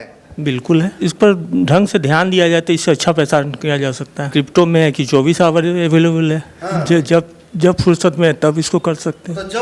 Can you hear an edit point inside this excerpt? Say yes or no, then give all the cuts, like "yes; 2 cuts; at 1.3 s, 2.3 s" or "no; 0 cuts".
yes; 2 cuts; at 1.0 s, 4.3 s